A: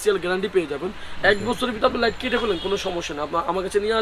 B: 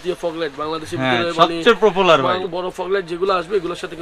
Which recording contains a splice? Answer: B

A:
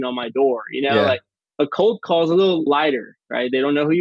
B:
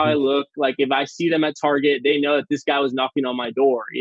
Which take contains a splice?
A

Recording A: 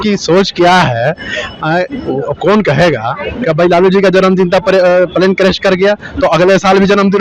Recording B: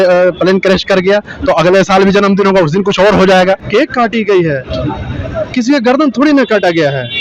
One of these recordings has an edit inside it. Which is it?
B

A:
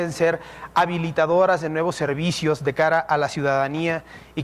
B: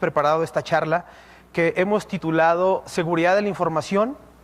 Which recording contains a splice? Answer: B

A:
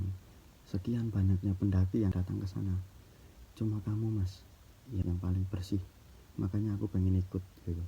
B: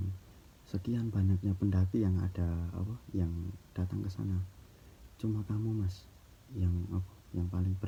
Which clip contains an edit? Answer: A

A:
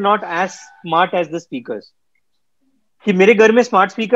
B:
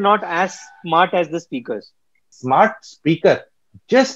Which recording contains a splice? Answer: B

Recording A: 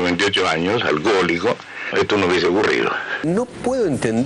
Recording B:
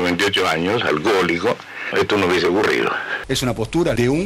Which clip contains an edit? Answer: A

